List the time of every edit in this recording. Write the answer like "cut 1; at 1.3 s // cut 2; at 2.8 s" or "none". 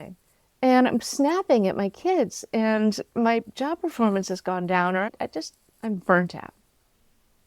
cut 1; at 5.1 s